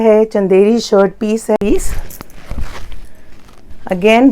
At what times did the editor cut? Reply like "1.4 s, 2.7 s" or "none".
1.6 s